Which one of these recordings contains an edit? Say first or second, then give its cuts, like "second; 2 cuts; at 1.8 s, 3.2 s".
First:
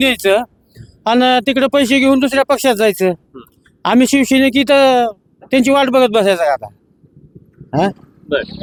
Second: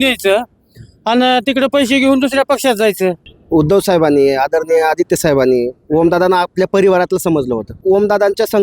second; 2 cuts; at 3.3 s, 7.8 s